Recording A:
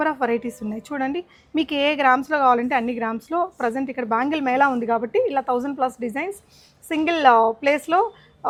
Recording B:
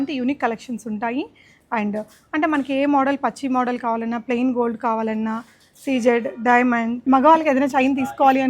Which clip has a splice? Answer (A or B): B